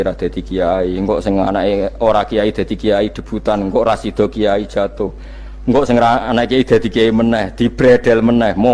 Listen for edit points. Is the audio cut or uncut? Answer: uncut